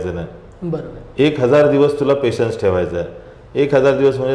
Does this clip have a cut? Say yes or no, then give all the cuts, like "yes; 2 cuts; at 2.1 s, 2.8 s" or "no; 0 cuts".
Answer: no; 0 cuts